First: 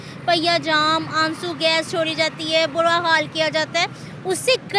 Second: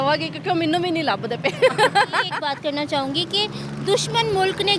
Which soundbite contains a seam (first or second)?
second